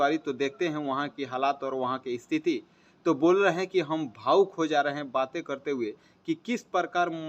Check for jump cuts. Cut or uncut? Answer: uncut